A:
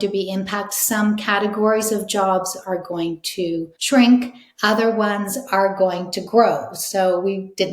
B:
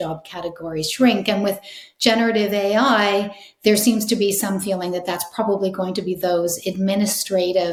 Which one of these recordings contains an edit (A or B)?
A